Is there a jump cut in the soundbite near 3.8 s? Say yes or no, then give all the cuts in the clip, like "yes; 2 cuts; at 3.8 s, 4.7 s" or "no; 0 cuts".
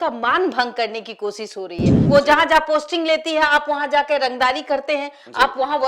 no; 1 cut; at 2.0 s